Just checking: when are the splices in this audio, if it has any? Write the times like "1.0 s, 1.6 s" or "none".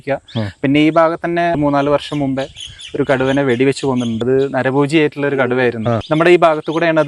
1.6 s, 4.2 s, 6.0 s